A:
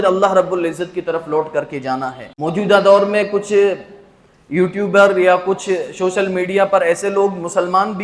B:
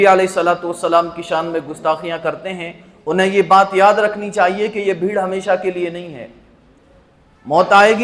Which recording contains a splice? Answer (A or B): A